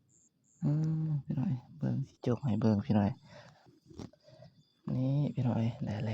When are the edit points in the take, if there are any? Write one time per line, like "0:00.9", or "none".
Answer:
0:03.7